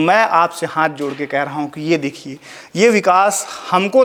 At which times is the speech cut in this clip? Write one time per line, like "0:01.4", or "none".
none